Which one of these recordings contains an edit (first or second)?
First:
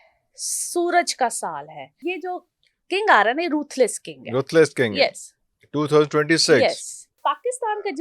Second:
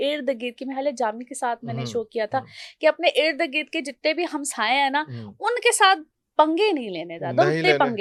first